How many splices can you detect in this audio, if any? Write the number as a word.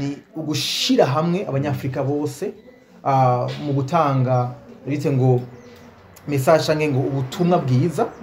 zero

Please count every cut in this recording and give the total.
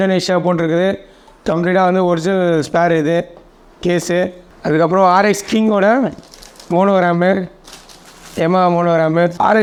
zero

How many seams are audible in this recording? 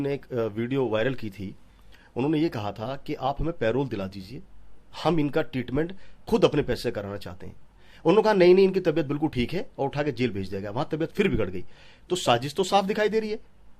zero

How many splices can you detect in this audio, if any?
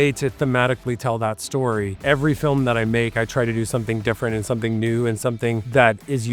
one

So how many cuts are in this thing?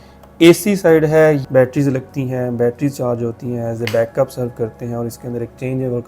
one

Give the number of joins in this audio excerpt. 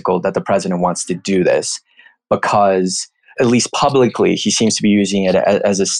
one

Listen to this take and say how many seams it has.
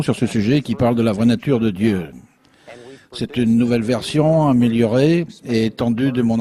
one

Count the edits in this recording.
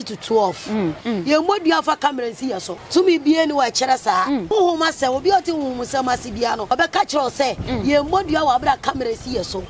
four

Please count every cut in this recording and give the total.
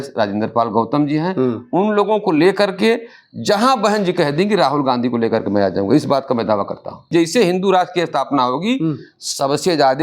one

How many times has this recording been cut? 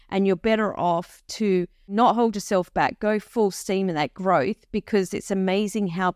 one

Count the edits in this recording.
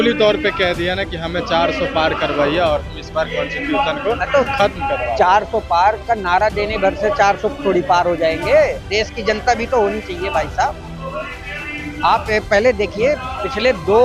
zero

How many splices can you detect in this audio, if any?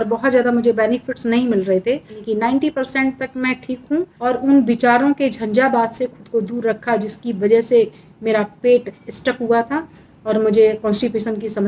two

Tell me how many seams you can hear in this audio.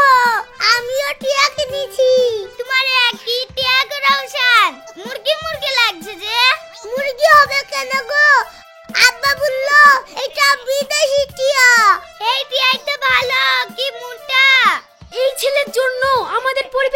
zero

